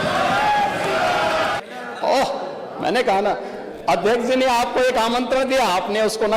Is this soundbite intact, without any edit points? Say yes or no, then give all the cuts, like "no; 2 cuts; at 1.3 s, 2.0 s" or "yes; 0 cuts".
no; 1 cut; at 1.6 s